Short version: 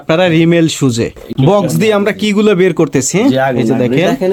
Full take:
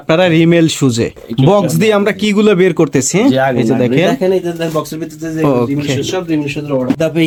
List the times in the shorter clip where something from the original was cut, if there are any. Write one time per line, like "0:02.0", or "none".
none

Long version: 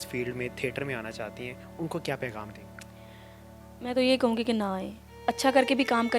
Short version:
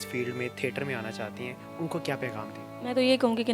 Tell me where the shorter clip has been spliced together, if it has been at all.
0:02.6

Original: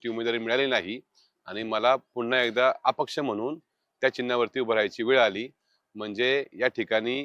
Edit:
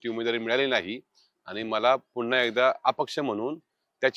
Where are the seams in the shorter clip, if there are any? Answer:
none

